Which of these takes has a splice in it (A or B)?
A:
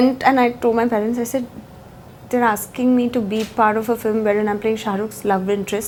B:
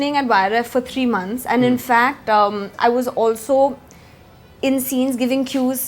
B